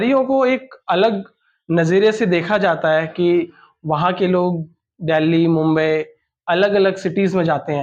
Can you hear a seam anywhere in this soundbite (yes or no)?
no